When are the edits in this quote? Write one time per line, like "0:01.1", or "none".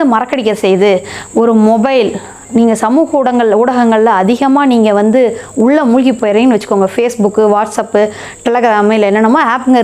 none